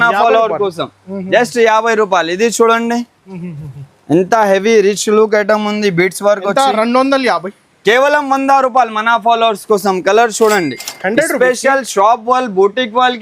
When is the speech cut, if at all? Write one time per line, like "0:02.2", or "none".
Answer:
0:03.2